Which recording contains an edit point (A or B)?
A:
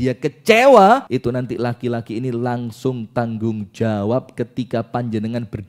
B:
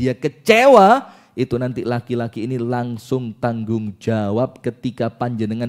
A